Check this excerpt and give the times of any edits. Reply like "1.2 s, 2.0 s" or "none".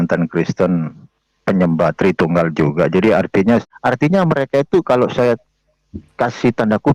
3.7 s